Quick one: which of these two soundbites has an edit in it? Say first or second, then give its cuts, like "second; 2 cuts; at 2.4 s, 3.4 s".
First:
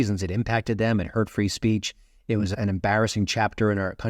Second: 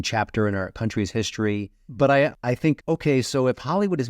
second; 2 cuts; at 1.8 s, 2.7 s